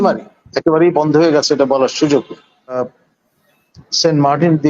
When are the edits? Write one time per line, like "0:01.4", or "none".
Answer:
0:02.8